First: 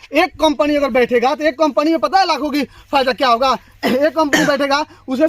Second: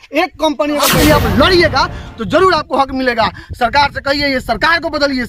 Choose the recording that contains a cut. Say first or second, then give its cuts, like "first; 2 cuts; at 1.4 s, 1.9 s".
second; 1 cut; at 0.9 s